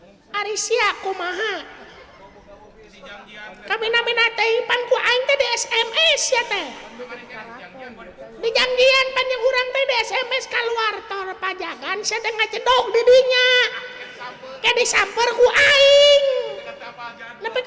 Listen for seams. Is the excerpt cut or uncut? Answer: uncut